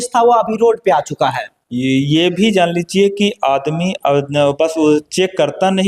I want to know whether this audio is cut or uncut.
uncut